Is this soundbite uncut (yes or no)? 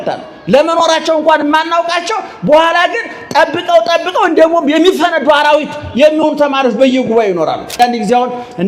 no